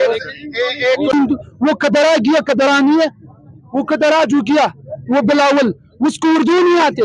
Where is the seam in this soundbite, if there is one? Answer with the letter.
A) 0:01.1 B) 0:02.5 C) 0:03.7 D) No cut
A